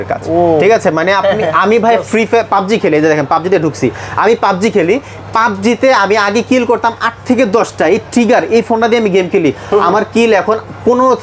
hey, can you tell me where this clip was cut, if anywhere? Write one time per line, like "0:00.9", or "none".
none